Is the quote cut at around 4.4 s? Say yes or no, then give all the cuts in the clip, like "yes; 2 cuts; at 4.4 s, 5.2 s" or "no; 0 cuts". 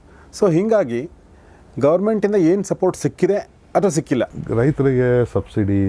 yes; 1 cut; at 4.4 s